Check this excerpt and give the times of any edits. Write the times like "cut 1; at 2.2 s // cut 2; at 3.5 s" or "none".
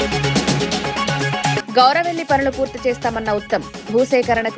cut 1; at 1.3 s